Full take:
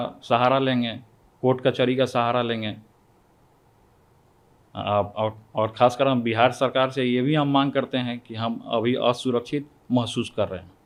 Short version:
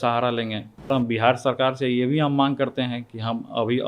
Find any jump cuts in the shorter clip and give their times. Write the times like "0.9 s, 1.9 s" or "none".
0.9 s